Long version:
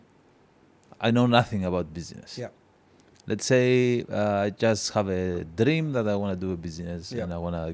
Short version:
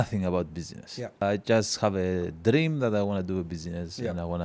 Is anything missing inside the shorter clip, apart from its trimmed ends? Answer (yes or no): yes